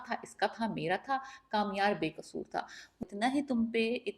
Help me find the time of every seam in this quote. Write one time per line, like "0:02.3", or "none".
0:03.0